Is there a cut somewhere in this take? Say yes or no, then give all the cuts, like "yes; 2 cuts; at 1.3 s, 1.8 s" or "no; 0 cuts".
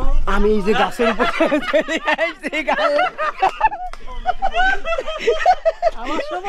no; 0 cuts